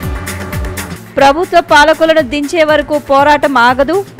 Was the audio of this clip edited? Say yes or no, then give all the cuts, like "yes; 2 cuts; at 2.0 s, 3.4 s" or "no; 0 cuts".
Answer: yes; 1 cut; at 0.9 s